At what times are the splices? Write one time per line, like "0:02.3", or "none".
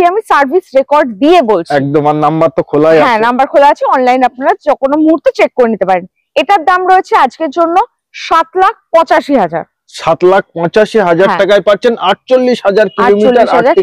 none

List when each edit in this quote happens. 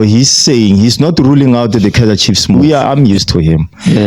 0:02.9

